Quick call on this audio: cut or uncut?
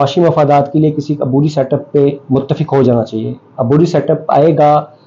uncut